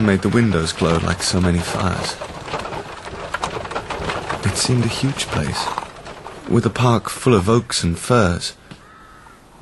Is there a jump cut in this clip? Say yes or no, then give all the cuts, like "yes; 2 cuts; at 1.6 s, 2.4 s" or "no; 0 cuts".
no; 0 cuts